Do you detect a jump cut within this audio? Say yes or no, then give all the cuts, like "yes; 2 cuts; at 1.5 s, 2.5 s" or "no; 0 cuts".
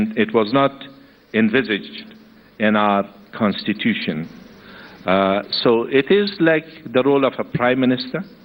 no; 0 cuts